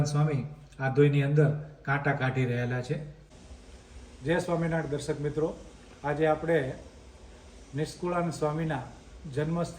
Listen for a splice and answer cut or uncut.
cut